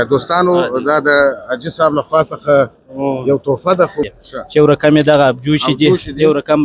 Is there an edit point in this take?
yes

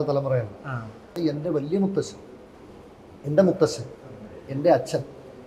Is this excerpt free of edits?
no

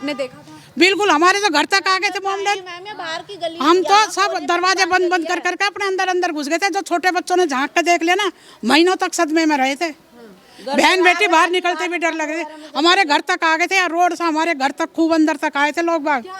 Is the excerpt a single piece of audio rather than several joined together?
yes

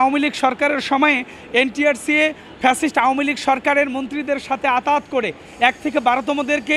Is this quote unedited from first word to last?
yes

